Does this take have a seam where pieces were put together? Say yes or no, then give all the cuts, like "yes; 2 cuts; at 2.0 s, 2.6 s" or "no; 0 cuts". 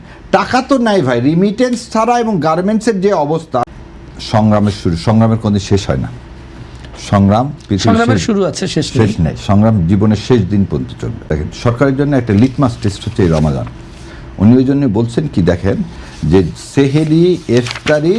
yes; 2 cuts; at 3.7 s, 11.2 s